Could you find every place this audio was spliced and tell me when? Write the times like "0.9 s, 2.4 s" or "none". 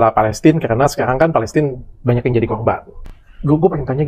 2.9 s